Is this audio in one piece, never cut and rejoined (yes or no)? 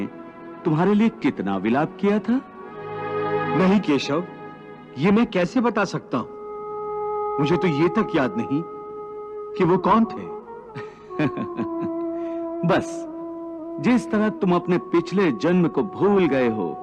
yes